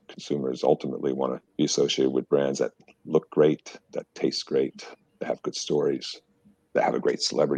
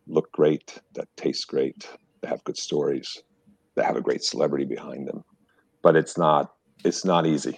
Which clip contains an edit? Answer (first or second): first